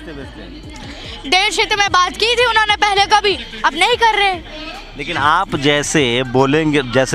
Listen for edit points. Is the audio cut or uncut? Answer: cut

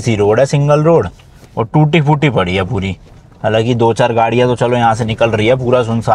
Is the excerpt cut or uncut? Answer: uncut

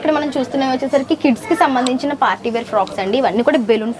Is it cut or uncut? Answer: uncut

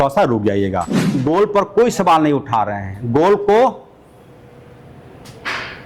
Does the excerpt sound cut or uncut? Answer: cut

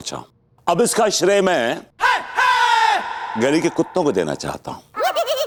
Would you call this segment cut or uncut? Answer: uncut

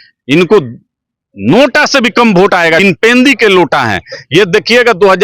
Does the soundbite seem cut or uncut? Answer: cut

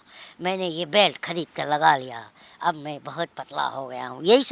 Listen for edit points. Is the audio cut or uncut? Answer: uncut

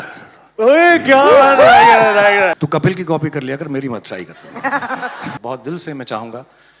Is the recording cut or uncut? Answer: cut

